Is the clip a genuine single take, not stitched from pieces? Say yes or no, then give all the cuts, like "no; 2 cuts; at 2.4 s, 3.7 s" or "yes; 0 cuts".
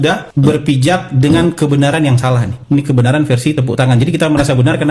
yes; 0 cuts